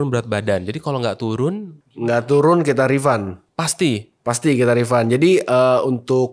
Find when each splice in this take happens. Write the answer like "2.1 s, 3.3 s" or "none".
none